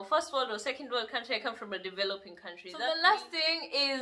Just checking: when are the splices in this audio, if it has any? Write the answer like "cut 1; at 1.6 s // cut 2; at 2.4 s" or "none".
cut 1; at 2.6 s